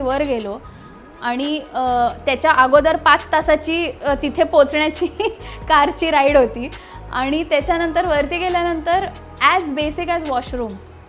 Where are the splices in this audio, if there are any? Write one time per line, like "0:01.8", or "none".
none